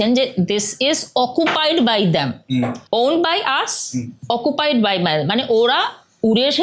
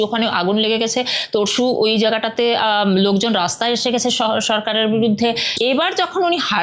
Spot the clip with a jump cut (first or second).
second